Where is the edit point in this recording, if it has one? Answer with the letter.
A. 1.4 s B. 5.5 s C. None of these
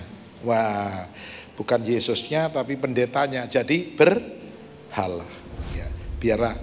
B